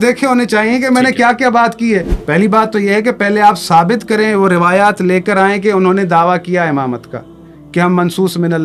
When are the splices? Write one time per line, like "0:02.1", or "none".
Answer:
0:02.1